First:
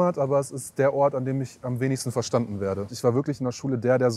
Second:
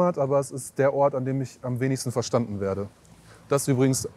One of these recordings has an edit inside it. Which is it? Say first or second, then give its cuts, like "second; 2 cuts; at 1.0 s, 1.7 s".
first; 1 cut; at 2.9 s